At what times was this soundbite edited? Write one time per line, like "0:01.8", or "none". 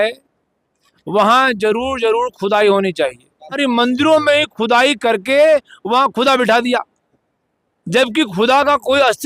0:03.6